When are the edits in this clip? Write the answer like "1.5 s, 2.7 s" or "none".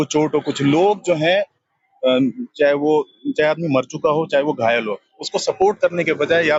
none